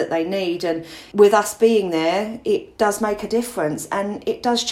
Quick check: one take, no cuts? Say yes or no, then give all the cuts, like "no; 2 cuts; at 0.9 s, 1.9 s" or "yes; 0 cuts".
no; 2 cuts; at 0.9 s, 2.7 s